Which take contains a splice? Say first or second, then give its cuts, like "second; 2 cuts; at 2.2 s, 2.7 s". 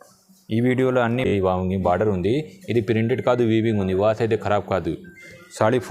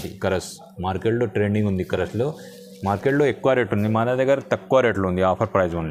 first; 1 cut; at 1.3 s